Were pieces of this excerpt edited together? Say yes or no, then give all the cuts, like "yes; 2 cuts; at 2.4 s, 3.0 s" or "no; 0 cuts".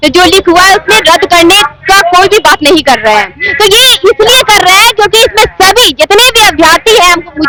no; 0 cuts